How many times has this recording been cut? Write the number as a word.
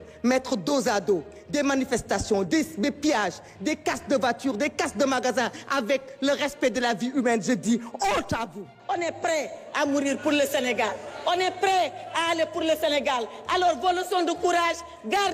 one